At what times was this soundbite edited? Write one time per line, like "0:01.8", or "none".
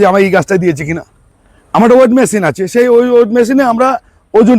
0:01.3